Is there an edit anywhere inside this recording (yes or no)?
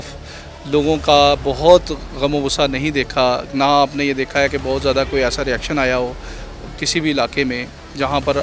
no